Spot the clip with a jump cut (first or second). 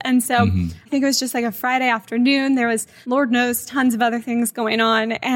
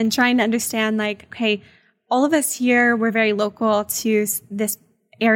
first